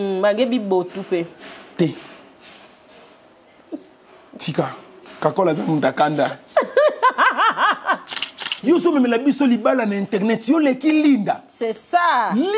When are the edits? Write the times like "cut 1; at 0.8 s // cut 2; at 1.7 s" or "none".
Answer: cut 1; at 8.5 s

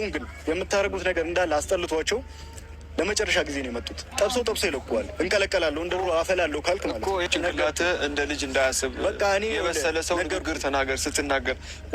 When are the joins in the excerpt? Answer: cut 1; at 7.3 s

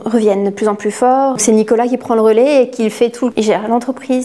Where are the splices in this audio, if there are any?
cut 1; at 1.4 s // cut 2; at 3.3 s

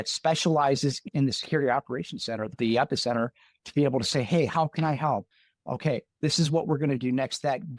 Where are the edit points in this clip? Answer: cut 1; at 1.0 s // cut 2; at 2.5 s

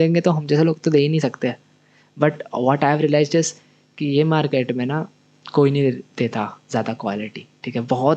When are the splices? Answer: none

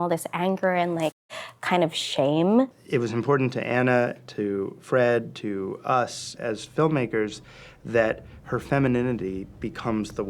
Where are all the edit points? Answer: cut 1; at 2.7 s // cut 2; at 6.3 s

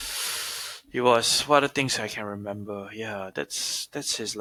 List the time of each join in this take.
none

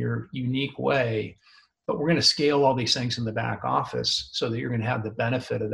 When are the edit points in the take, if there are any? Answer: none

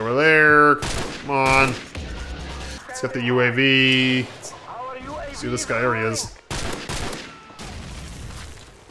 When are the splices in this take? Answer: cut 1; at 2.7 s

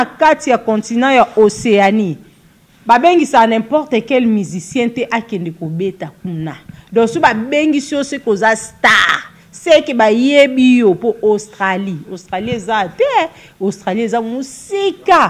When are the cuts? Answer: none

